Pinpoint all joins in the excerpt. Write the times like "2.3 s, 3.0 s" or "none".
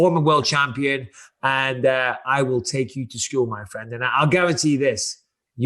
none